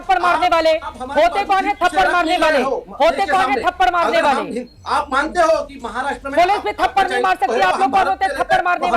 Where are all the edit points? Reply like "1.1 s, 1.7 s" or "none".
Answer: none